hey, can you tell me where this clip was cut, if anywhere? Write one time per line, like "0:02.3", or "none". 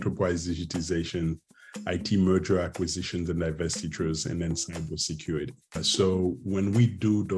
0:05.8